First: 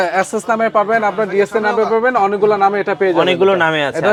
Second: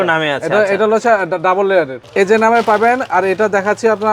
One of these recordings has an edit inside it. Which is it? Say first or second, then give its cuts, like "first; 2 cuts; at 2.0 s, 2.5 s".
second; 1 cut; at 2.0 s